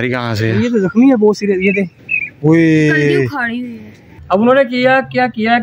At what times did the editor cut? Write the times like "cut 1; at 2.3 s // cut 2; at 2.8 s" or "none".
cut 1; at 4.1 s